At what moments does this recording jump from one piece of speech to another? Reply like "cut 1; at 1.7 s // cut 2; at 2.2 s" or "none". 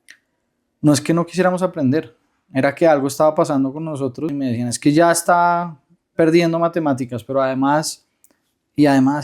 cut 1; at 4.3 s